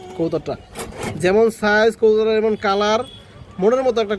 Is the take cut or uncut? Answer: uncut